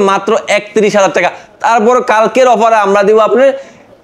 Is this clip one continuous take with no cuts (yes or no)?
yes